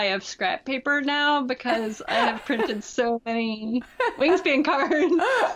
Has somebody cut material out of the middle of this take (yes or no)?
no